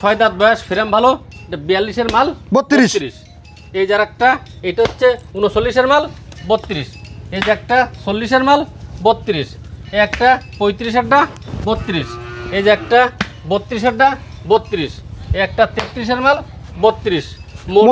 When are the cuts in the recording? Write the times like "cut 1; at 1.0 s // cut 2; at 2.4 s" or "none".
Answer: none